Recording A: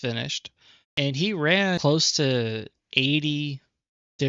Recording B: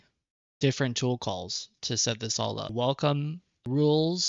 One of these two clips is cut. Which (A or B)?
B